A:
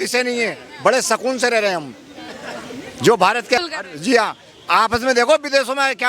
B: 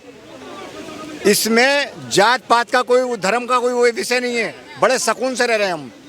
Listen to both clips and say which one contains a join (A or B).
A